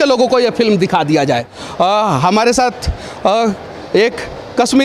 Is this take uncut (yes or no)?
no